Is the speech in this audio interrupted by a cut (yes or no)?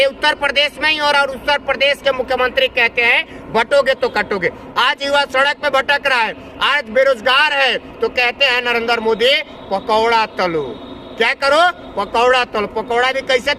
yes